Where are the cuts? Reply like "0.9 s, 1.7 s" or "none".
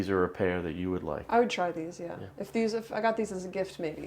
1.2 s